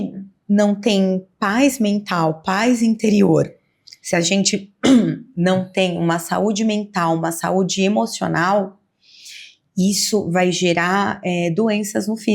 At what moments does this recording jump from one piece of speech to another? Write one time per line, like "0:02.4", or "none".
none